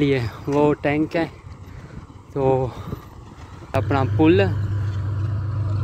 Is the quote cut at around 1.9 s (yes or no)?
no